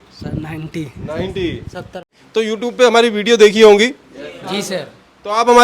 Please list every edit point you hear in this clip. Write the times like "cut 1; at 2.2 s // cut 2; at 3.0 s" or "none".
cut 1; at 2.2 s